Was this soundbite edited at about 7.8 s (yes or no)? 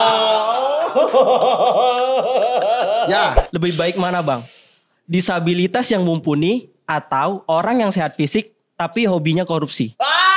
no